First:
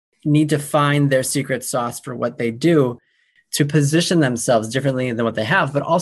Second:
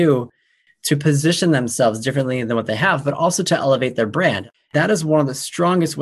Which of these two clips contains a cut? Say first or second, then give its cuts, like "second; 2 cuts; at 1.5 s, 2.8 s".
second; 1 cut; at 4.7 s